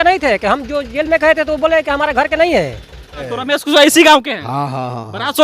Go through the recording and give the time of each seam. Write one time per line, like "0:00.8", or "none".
0:03.3

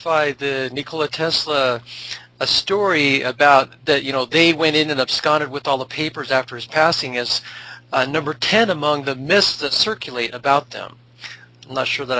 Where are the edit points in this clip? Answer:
none

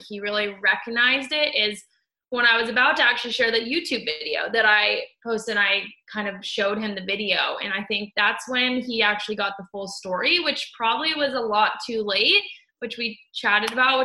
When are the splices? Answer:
none

